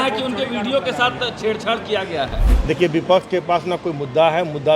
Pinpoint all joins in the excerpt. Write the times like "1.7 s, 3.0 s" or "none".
2.5 s